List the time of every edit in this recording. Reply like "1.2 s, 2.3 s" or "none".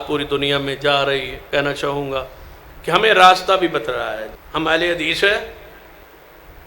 1.4 s, 4.4 s